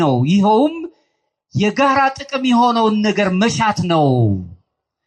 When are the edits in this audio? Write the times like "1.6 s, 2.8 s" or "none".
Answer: none